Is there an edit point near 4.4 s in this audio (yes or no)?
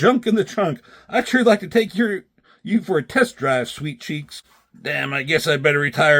yes